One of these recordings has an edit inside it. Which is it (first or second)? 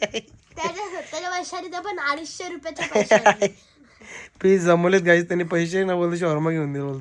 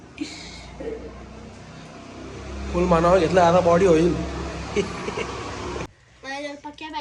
second